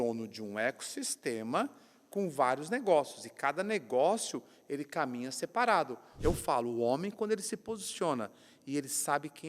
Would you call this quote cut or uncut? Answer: cut